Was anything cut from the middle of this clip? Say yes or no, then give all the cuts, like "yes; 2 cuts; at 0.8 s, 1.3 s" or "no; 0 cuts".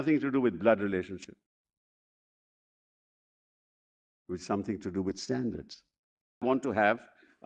yes; 1 cut; at 6.4 s